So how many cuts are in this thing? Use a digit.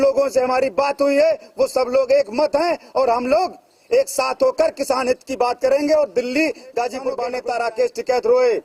1